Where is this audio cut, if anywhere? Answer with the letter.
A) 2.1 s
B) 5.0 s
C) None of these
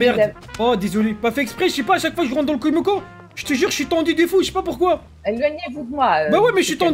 C